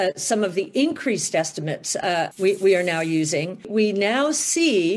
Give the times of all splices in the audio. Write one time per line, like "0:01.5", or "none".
0:03.7